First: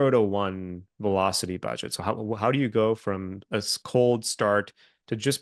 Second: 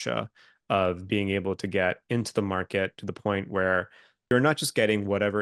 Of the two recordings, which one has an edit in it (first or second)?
second